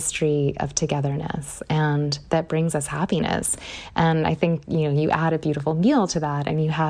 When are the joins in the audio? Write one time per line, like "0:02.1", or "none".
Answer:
none